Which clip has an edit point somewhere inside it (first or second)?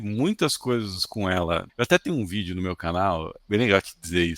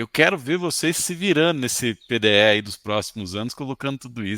first